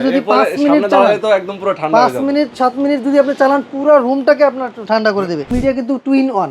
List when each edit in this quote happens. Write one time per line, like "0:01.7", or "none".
0:05.5